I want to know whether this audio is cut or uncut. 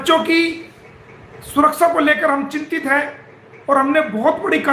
uncut